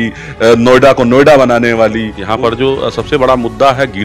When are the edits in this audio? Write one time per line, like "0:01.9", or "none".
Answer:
0:02.2